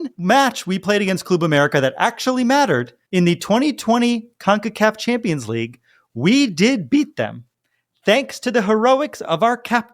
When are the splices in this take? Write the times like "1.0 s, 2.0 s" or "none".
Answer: 3.0 s